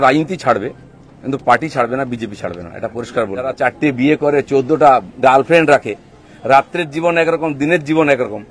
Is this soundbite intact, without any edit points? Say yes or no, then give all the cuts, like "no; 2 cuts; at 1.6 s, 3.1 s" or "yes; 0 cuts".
no; 1 cut; at 3.6 s